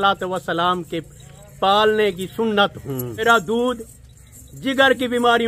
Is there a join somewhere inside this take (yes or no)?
yes